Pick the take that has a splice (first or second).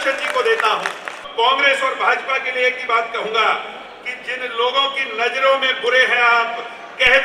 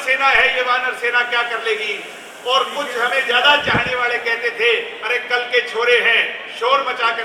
first